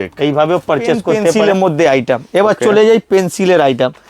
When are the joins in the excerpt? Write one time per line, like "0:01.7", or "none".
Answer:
0:01.3

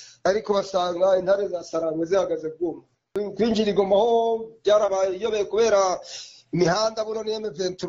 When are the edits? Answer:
0:03.1

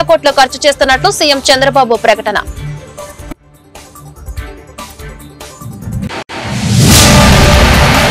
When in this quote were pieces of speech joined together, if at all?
none

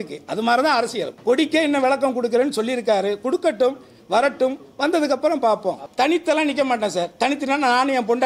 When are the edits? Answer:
0:01.1
0:05.8

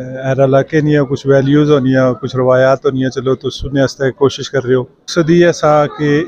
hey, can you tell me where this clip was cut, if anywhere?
0:05.1

